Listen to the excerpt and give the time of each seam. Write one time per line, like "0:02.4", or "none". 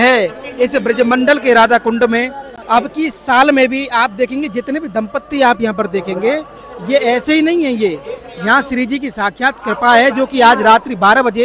0:02.5